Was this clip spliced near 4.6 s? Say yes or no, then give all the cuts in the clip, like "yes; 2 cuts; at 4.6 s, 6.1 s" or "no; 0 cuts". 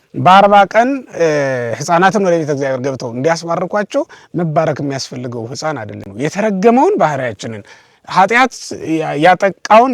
no; 1 cut; at 6.0 s